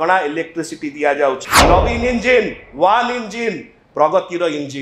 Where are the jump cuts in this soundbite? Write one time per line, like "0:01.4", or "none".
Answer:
0:01.5